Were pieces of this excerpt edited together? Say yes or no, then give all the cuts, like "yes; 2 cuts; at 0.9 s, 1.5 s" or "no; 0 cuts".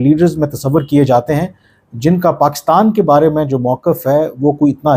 no; 0 cuts